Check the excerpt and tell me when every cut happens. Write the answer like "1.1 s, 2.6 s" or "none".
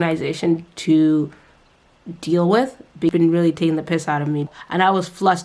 3.1 s, 4.5 s